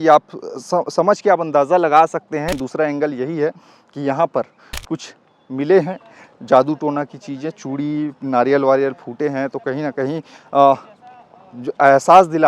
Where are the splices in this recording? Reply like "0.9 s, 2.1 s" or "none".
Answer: 2.6 s